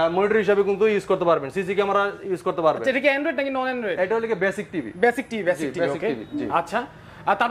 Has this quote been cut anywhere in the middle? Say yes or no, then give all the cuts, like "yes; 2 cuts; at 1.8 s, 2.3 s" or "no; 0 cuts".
no; 0 cuts